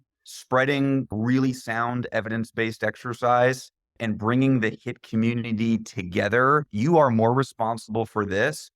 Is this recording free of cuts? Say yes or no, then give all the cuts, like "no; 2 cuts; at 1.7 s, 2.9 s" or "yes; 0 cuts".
no; 2 cuts; at 1.1 s, 4.0 s